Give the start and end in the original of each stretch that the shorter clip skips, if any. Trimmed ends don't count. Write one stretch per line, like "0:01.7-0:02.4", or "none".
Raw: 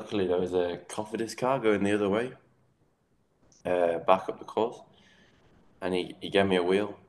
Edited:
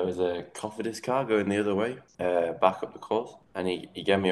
0:02.4-0:03.5
0:04.9-0:05.7